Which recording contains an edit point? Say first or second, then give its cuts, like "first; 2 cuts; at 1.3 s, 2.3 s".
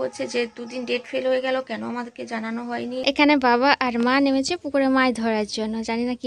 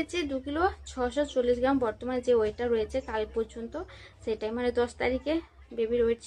first; 1 cut; at 3.0 s